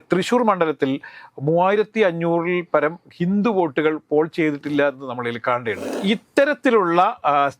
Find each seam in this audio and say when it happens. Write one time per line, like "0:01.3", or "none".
0:05.9